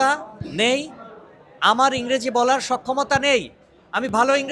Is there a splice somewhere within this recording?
no; 0 cuts

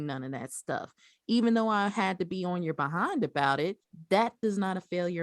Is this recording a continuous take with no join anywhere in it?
no; 1 cut; at 3.9 s

